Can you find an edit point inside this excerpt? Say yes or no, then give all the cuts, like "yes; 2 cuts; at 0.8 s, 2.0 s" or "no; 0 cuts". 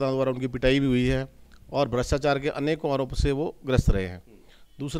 no; 0 cuts